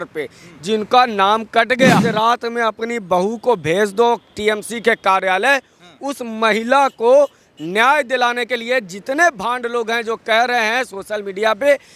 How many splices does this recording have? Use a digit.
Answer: 1